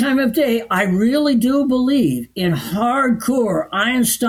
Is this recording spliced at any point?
no; 0 cuts

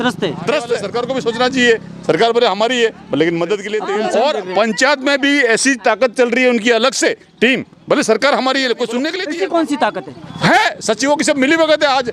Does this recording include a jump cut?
yes; 3 cuts; at 0.9 s, 3.7 s, 9.2 s

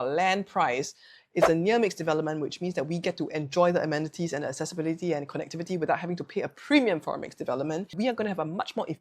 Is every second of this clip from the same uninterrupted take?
no; 1 cut; at 7.9 s

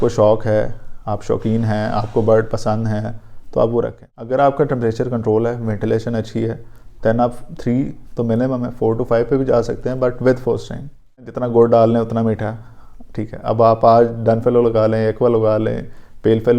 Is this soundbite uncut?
no; 2 cuts; at 4.0 s, 11.3 s

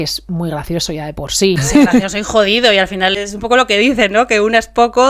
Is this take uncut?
no; 2 cuts; at 1.6 s, 3.1 s

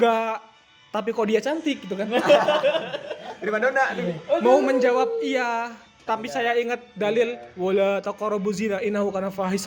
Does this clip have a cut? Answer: no; 0 cuts

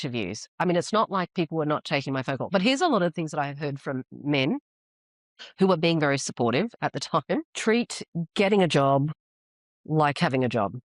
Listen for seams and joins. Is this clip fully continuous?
yes; 0 cuts

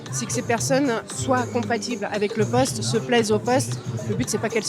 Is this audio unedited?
no; 1 cut; at 1.0 s

